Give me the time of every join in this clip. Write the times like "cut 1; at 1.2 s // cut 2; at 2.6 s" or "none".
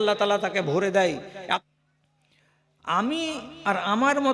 cut 1; at 1.6 s